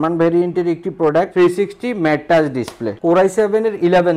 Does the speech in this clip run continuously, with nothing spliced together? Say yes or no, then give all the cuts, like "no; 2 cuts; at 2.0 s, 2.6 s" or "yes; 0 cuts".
no; 2 cuts; at 1.3 s, 2.8 s